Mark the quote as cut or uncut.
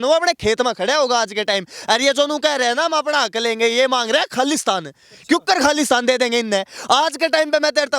uncut